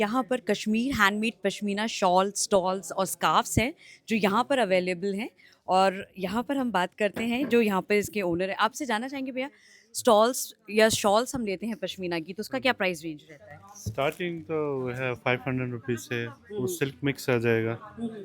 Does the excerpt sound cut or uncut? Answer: uncut